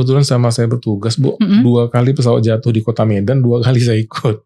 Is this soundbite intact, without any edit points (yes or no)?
yes